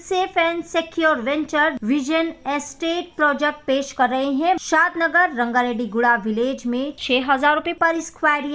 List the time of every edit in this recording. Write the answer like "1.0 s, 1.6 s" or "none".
1.8 s, 4.6 s